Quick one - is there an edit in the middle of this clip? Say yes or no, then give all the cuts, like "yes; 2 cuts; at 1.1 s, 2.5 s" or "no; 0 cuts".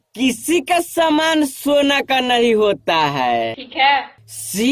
no; 0 cuts